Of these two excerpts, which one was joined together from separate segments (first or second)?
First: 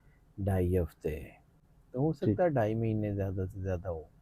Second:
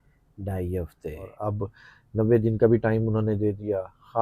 second